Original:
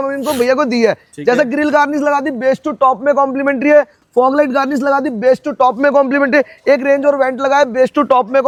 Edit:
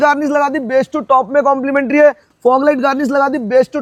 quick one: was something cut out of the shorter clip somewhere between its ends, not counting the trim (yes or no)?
no